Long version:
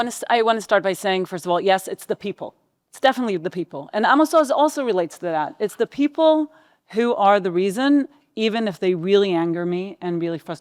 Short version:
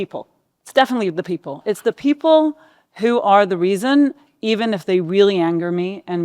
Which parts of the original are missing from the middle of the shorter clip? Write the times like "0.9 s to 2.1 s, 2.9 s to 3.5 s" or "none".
3.8 s to 5.5 s